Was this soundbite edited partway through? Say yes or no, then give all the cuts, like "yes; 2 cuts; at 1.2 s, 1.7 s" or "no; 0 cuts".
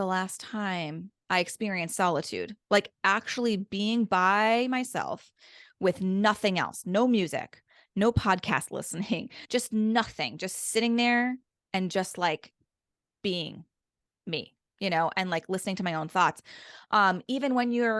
yes; 1 cut; at 9.4 s